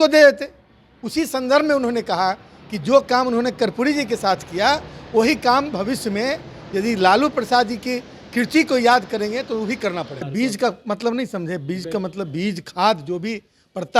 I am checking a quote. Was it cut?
yes; 1 cut; at 10.2 s

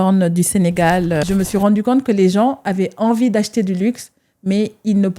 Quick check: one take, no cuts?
no; 1 cut; at 1.2 s

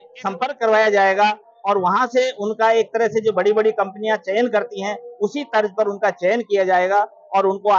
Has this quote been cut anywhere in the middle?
no; 0 cuts

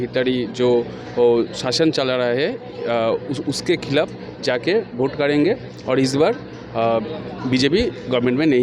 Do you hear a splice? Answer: no; 0 cuts

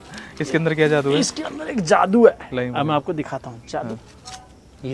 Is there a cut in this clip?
no; 0 cuts

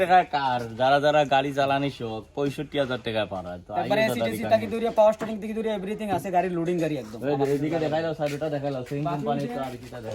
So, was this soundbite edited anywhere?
no; 0 cuts

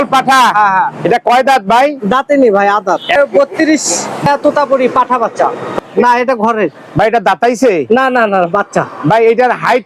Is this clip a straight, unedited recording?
no; 3 cuts; at 3.1 s, 4.3 s, 5.7 s

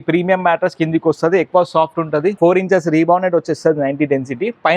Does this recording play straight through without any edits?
no; 1 cut; at 2.3 s

